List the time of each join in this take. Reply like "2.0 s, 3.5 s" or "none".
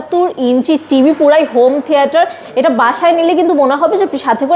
none